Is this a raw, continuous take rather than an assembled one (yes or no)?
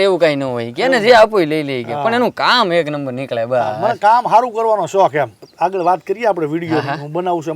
no